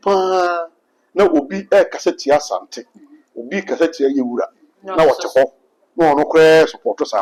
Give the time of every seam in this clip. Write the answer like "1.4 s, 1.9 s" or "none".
none